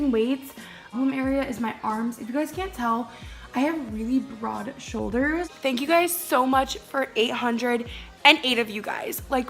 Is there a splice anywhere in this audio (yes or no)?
yes